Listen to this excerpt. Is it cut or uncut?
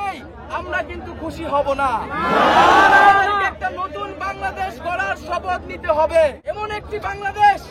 cut